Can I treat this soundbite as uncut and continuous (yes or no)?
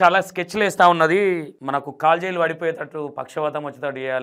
yes